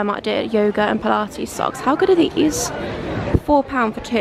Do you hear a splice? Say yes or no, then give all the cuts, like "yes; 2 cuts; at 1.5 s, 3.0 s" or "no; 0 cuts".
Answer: no; 0 cuts